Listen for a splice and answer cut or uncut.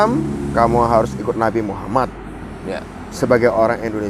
uncut